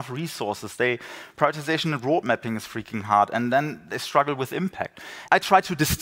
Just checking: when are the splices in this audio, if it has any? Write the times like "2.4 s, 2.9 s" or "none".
5.1 s